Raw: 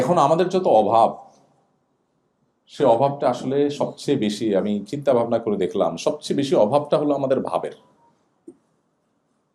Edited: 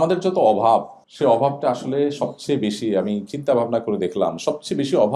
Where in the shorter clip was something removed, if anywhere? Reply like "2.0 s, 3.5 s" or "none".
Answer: 1.0 s